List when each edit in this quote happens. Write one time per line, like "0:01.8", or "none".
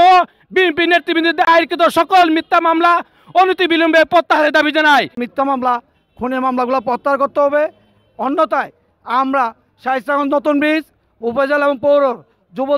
0:01.5
0:05.2